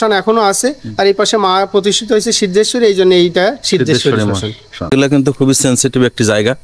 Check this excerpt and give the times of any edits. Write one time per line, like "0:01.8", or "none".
0:04.8